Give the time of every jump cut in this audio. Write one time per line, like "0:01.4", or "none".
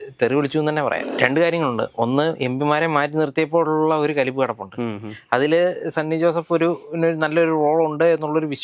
0:01.1